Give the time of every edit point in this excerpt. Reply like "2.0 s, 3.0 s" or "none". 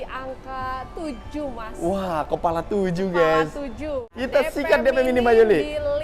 4.1 s